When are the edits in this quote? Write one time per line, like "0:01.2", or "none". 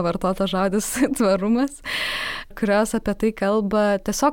0:02.5